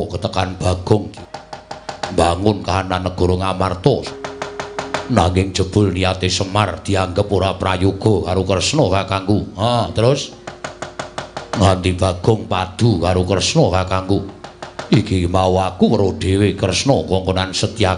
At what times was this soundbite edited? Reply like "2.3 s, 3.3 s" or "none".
1.1 s, 4.1 s